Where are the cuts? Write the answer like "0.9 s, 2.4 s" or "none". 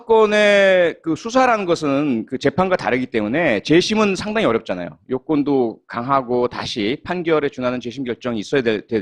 8.0 s